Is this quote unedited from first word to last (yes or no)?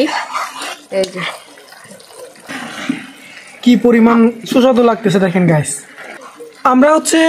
no